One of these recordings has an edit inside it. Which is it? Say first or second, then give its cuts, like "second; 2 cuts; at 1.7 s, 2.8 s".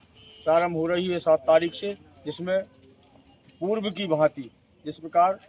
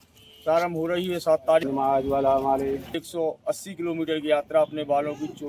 second; 2 cuts; at 1.6 s, 3.0 s